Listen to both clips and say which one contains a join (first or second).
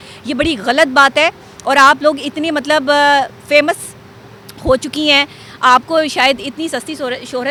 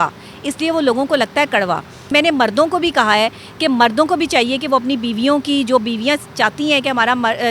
second